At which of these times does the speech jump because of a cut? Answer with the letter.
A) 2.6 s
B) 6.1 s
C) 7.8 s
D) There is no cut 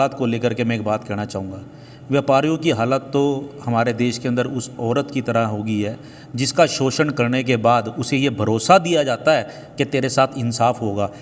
D